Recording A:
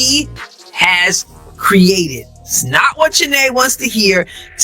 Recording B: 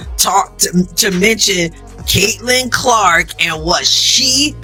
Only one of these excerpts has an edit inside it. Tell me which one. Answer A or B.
A